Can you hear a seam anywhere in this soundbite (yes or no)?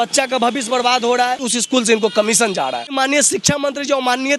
yes